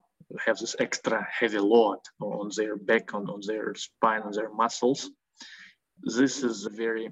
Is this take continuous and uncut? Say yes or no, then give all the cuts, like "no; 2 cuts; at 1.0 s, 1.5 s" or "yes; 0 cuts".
no; 1 cut; at 5.9 s